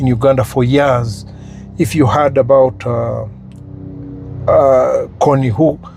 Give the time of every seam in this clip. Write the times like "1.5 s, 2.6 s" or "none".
none